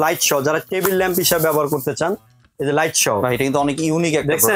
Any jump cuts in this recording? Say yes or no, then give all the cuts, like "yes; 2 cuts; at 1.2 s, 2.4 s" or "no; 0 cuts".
no; 0 cuts